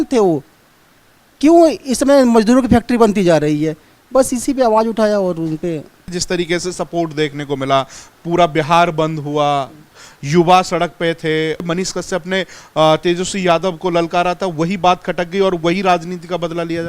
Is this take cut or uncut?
cut